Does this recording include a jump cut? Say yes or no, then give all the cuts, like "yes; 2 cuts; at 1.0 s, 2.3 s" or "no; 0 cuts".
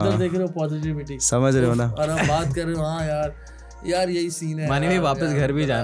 no; 0 cuts